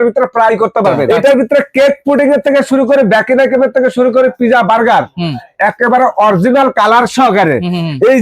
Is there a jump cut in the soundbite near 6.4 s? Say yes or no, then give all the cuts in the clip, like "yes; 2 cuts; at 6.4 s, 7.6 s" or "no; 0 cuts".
no; 1 cut; at 1.0 s